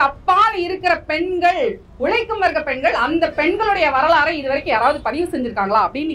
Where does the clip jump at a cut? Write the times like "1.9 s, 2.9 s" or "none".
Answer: none